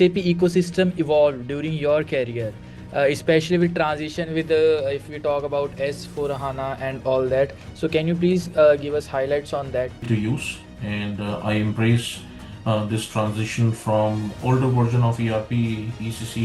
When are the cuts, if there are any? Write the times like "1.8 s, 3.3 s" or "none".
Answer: 10.1 s